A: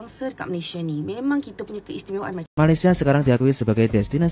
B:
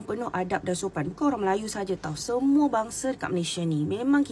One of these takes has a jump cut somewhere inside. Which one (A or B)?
A